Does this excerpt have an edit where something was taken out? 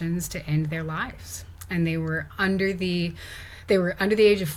no; 0 cuts

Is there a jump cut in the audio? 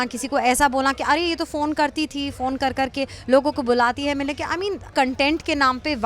yes; 1 cut; at 4.9 s

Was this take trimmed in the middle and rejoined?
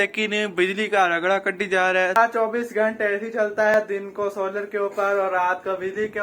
yes; 2 cuts; at 2.2 s, 3.7 s

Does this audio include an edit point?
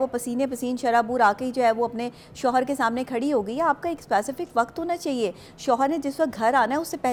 no; 0 cuts

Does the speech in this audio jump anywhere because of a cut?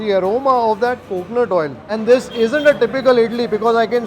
yes; 1 cut; at 1.8 s

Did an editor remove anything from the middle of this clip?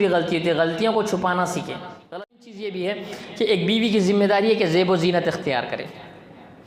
yes; 1 cut; at 2.1 s

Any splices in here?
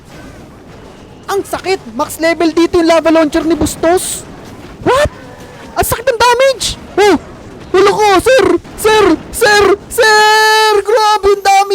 no; 0 cuts

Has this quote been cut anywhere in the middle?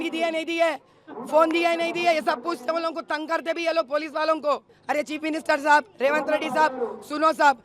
yes; 1 cut; at 4.7 s

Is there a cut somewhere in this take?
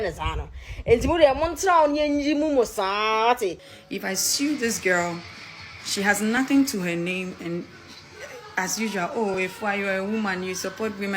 yes; 1 cut; at 3.7 s

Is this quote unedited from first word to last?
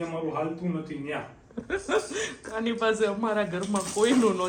yes; 0 cuts

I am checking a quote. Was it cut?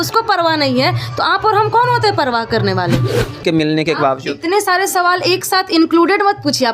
yes; 1 cut; at 3.4 s

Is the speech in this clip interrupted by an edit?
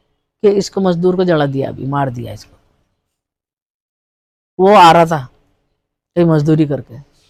no; 0 cuts

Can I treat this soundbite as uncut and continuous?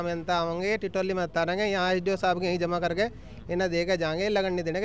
yes; 0 cuts

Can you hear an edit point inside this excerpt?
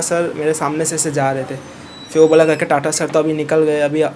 no; 0 cuts

